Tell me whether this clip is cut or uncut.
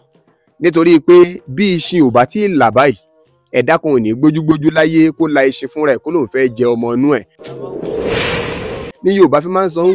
cut